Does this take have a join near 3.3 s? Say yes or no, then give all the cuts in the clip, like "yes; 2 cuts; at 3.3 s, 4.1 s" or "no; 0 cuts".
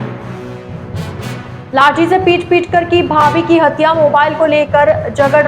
no; 1 cut; at 1.2 s